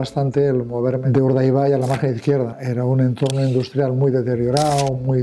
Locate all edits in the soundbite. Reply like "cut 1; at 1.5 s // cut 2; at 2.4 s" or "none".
cut 1; at 1.0 s // cut 2; at 2.5 s